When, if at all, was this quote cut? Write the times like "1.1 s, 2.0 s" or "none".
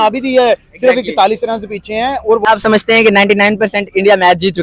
2.4 s